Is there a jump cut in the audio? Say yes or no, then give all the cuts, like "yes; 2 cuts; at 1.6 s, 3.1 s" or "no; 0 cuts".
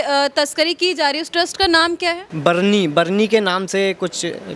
yes; 1 cut; at 2.3 s